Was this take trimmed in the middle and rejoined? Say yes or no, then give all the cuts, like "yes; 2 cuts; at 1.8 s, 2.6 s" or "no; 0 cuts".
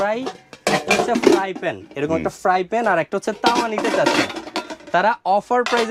no; 0 cuts